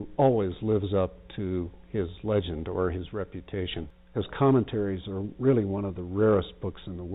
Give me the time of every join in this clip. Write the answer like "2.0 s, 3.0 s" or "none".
4.2 s